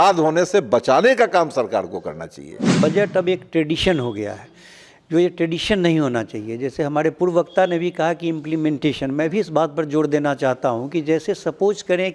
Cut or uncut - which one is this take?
cut